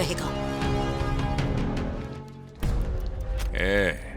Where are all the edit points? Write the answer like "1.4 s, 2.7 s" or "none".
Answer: 2.0 s